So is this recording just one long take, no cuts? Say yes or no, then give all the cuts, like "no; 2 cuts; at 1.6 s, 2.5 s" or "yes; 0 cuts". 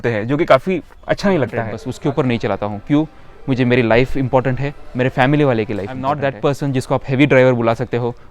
no; 2 cuts; at 1.8 s, 6.2 s